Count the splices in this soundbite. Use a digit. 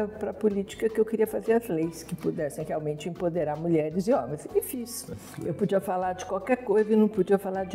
1